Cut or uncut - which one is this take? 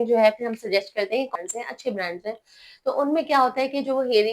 cut